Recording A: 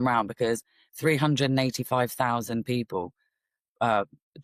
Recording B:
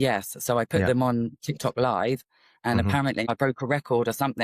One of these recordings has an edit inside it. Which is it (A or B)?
B